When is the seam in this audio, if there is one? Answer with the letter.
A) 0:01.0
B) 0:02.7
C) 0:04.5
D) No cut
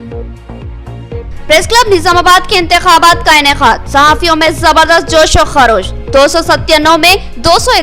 A